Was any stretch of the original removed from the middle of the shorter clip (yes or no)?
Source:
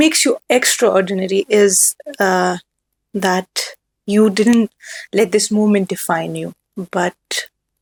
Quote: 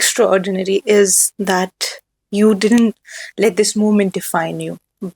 yes